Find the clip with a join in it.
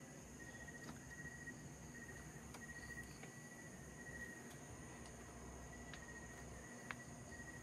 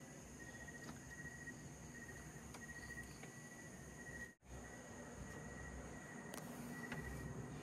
second; 1 cut; at 4.4 s

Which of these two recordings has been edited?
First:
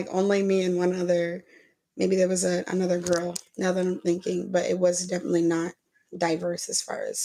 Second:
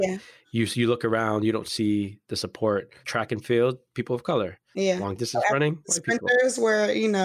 second; 1 cut; at 2.9 s

